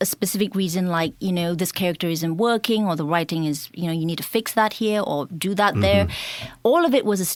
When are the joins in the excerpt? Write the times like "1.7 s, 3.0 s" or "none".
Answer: none